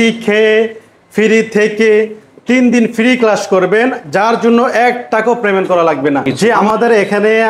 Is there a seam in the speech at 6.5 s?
yes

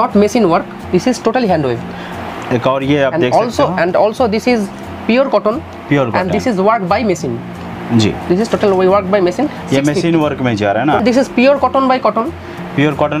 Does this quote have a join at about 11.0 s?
yes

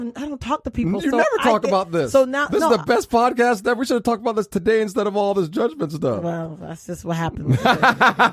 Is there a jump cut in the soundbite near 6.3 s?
no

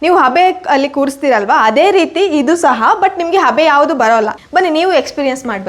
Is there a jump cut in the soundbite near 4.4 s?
yes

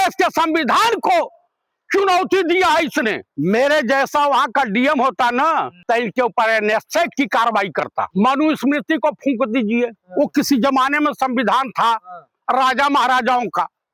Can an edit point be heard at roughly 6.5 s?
no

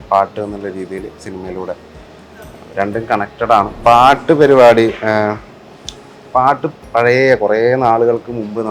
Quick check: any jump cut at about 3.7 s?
yes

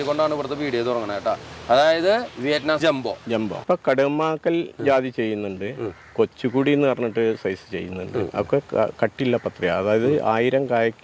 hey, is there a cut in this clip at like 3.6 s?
yes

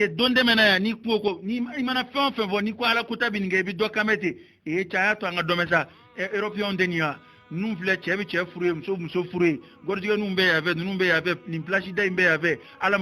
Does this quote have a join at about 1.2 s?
yes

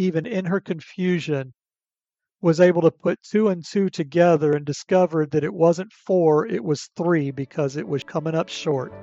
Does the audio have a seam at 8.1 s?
yes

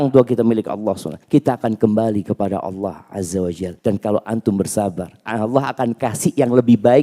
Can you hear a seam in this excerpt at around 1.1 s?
yes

